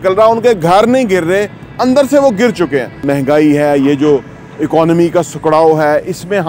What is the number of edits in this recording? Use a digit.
1